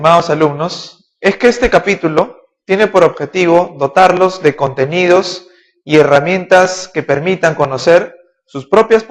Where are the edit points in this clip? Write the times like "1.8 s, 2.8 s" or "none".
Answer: none